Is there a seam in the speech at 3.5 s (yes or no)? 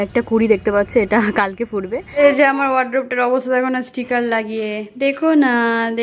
no